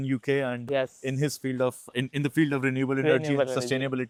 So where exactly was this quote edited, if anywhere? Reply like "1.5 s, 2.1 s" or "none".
none